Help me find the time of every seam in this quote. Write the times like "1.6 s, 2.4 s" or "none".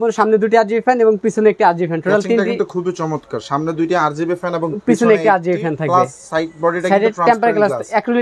none